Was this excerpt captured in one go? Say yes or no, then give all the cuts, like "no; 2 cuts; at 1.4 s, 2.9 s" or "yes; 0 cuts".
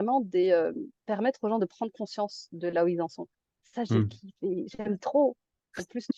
yes; 0 cuts